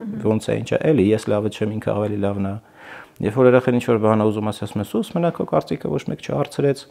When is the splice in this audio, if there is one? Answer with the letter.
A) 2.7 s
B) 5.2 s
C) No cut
C